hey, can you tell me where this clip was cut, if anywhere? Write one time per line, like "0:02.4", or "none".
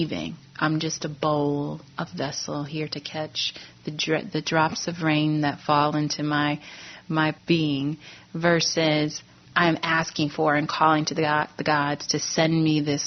0:07.4
0:09.5